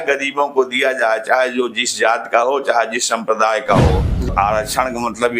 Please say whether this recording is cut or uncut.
cut